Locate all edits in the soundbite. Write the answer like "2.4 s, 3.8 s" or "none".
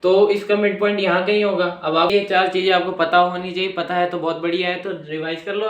2.1 s